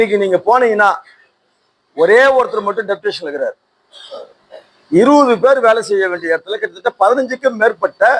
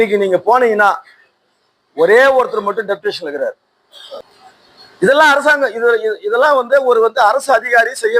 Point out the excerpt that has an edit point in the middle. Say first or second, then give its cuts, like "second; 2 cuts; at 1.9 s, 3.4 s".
second; 1 cut; at 4.3 s